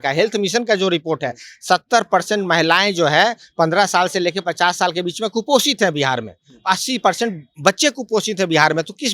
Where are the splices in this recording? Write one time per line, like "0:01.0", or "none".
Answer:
none